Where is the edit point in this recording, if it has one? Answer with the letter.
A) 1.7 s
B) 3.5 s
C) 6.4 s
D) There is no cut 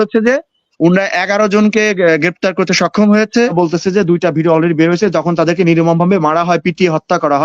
B